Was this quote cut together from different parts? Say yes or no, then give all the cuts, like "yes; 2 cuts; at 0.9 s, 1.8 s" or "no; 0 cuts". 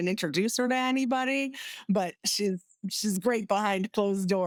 no; 0 cuts